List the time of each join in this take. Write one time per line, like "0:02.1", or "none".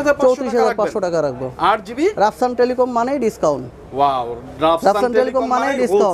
none